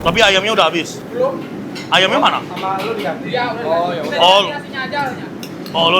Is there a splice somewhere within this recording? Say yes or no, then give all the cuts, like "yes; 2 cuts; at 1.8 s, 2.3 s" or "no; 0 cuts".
yes; 1 cut; at 1.0 s